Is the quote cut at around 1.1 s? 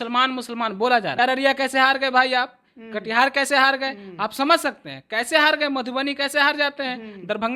yes; 1 cut; at 1.1 s

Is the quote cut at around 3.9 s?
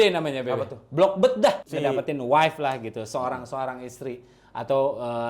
no; 1 cut; at 1.6 s

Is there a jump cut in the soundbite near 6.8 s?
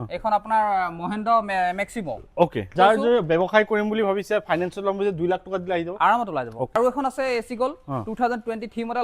yes; 2 cuts; at 2.7 s, 6.8 s

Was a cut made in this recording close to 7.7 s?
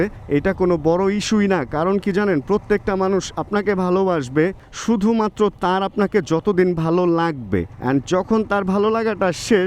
yes; 1 cut; at 7.7 s

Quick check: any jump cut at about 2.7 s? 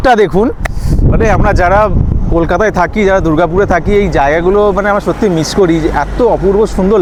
no; 0 cuts

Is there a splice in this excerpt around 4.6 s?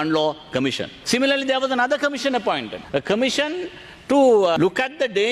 yes; 3 cuts; at 0.9 s, 2.7 s, 4.6 s

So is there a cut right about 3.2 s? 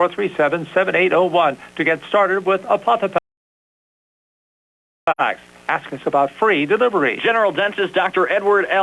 no; 0 cuts

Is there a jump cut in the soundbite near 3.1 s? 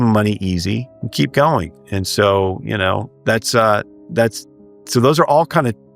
yes; 2 cuts; at 1.0 s, 3.1 s

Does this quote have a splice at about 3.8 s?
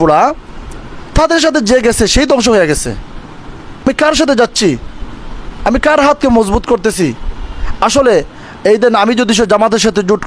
yes; 1 cut; at 3.8 s

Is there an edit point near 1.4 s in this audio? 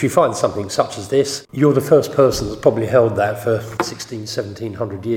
yes; 1 cut; at 1.4 s

